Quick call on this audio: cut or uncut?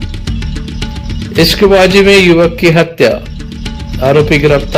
uncut